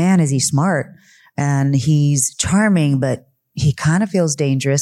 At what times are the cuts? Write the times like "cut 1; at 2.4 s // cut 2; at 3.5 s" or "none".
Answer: none